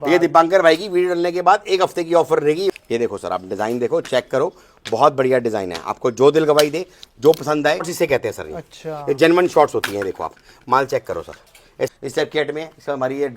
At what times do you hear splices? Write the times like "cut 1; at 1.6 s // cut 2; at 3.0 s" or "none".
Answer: cut 1; at 2.7 s // cut 2; at 7.9 s // cut 3; at 11.9 s